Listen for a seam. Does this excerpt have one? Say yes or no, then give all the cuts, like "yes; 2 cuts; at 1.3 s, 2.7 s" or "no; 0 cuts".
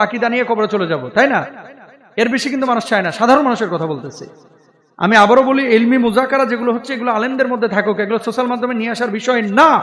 no; 0 cuts